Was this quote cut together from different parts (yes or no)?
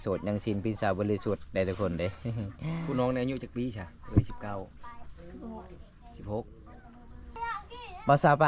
yes